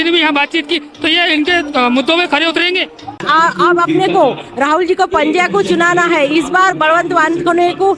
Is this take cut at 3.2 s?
yes; 1 cut; at 3.2 s

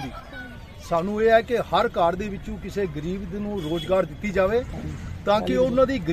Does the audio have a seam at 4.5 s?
no; 0 cuts

